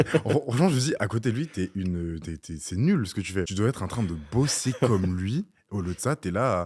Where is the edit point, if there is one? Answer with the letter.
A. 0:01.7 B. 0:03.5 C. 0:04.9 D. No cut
B